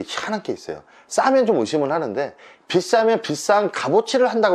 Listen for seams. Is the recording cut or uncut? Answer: uncut